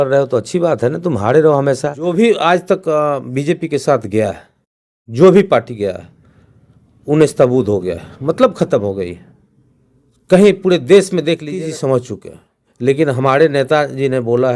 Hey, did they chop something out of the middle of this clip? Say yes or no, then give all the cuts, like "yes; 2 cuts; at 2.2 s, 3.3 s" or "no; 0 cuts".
yes; 2 cuts; at 2.1 s, 11.6 s